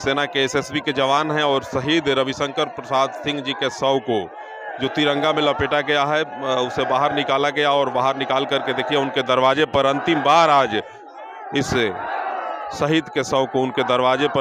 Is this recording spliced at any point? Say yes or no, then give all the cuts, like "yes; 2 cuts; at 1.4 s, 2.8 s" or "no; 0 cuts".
no; 0 cuts